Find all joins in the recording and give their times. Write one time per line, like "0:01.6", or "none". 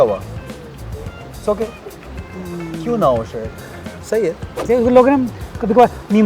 0:04.7